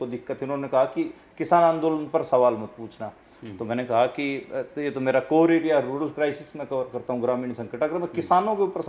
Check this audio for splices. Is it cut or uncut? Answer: uncut